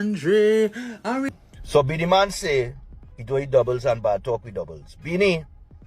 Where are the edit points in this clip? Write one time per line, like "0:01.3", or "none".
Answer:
0:01.7